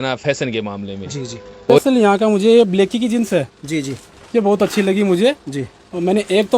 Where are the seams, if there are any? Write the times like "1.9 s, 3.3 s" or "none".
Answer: 1.8 s